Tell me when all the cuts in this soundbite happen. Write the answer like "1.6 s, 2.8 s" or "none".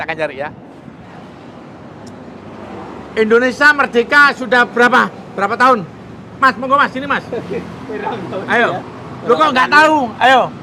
1.1 s